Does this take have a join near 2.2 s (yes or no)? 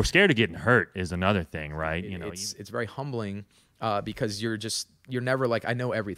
yes